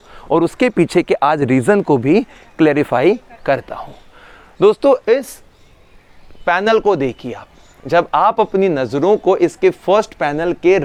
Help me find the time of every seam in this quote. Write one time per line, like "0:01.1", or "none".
none